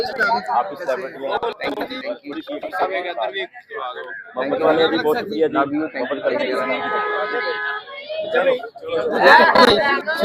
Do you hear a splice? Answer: no; 0 cuts

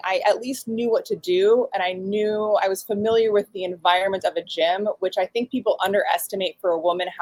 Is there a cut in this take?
no; 0 cuts

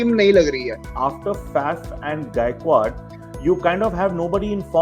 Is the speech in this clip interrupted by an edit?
no; 0 cuts

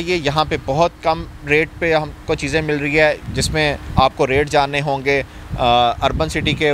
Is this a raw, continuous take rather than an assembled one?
yes; 0 cuts

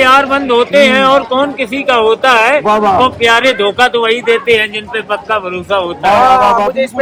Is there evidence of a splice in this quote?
no; 0 cuts

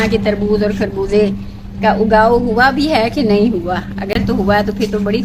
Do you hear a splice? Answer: no; 0 cuts

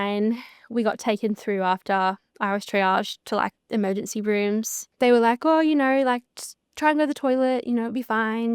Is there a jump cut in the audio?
yes; 1 cut; at 4.8 s

